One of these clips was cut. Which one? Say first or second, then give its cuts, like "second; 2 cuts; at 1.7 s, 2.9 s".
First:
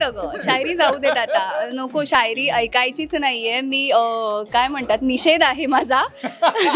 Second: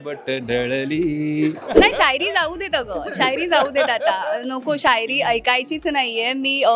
second; 1 cut; at 1.8 s